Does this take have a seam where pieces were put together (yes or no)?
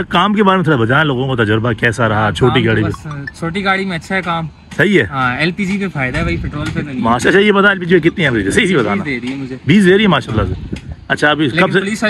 no